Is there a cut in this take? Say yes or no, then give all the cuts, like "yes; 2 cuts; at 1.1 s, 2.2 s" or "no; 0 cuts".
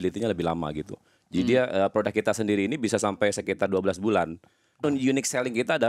yes; 1 cut; at 4.8 s